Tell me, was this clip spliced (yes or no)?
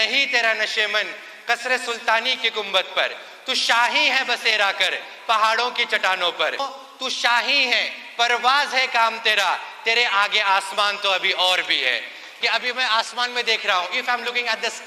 yes